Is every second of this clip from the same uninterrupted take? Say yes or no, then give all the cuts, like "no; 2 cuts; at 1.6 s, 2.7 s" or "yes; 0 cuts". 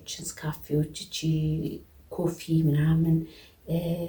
yes; 0 cuts